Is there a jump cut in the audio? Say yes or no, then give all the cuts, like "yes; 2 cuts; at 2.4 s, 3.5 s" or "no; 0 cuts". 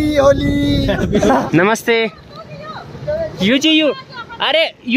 yes; 1 cut; at 1.3 s